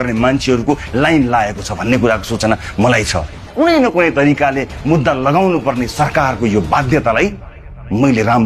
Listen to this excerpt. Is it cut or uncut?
cut